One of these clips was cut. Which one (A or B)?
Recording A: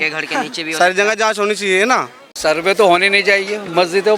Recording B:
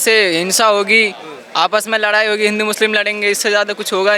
A